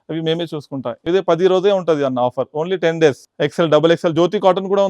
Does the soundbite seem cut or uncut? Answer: cut